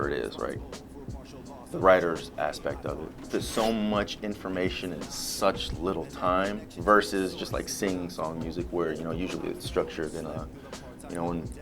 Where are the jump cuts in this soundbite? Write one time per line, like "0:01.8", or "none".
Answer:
0:03.3